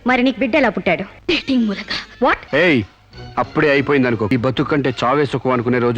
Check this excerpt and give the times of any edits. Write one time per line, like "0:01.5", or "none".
0:01.1
0:02.4
0:04.3